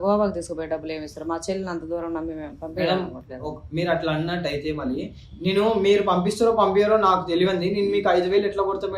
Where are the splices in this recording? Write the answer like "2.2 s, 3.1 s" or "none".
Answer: none